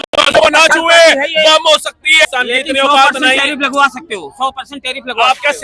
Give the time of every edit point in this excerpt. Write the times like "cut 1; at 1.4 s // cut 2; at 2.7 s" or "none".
cut 1; at 2.3 s